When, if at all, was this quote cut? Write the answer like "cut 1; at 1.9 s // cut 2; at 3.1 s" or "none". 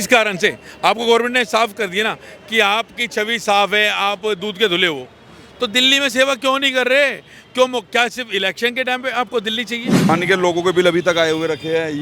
cut 1; at 10.1 s